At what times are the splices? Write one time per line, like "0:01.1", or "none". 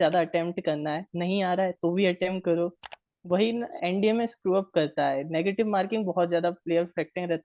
none